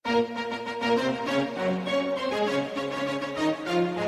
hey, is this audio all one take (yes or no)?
yes